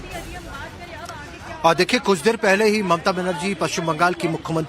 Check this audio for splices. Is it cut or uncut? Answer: cut